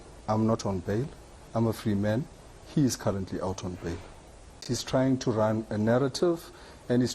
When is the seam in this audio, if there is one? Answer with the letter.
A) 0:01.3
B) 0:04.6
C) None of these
B